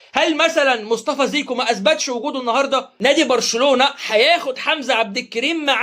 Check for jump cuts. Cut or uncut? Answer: cut